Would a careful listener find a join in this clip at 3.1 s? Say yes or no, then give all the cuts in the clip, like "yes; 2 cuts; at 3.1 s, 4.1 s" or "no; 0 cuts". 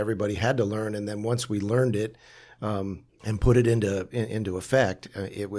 yes; 1 cut; at 3.1 s